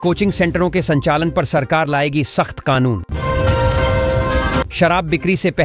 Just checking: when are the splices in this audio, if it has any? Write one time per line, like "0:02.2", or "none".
0:03.1
0:04.7